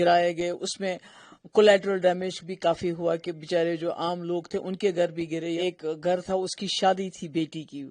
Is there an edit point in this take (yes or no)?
yes